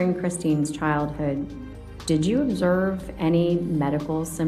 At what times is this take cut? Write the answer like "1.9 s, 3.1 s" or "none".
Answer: none